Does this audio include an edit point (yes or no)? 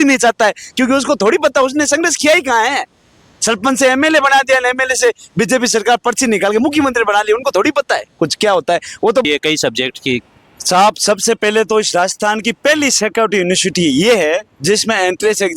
yes